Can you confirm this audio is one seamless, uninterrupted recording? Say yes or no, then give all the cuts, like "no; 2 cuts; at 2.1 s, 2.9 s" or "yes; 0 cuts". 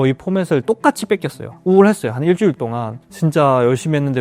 yes; 0 cuts